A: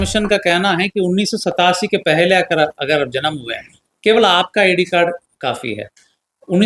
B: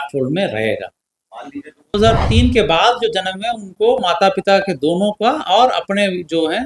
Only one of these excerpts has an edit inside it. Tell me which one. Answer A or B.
B